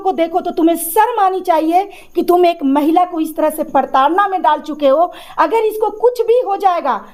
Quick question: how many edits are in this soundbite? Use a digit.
0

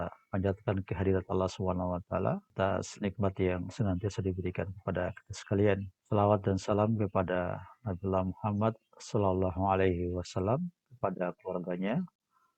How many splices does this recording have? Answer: 2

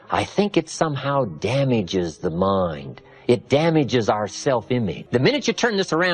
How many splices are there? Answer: 1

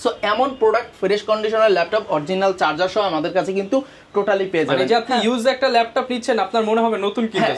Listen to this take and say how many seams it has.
0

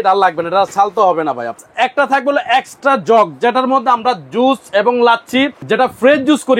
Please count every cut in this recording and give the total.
2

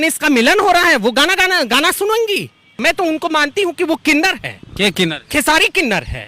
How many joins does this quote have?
1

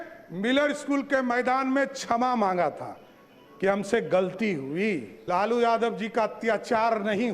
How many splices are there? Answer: 1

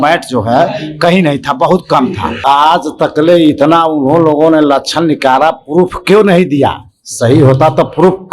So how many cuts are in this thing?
1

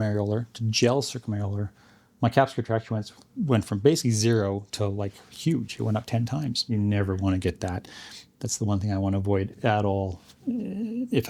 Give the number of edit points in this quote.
1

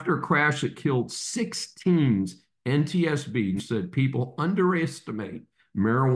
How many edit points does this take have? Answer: 1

